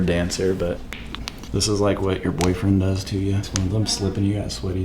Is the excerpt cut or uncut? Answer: cut